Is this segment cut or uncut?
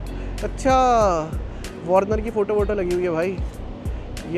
uncut